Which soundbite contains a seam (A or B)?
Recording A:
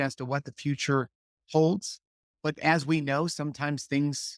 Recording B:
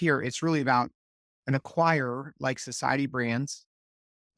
A